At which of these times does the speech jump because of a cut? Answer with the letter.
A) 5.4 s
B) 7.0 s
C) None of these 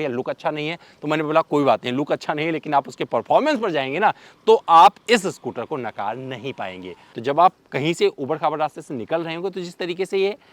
B